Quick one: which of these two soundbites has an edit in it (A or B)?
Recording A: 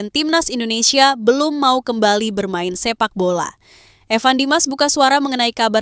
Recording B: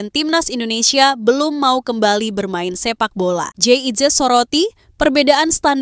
B